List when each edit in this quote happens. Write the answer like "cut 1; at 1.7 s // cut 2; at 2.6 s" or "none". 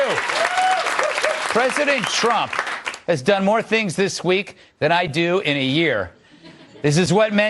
none